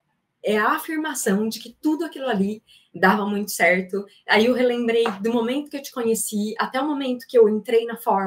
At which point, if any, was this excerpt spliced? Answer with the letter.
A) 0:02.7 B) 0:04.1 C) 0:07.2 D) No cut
D